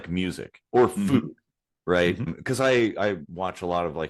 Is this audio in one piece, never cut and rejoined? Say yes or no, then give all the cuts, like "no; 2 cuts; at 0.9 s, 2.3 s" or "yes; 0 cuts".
no; 2 cuts; at 2.4 s, 3.3 s